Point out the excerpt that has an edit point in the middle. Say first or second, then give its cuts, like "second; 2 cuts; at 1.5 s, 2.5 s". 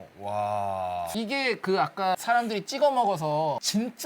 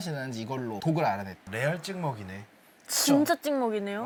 first; 1 cut; at 1.1 s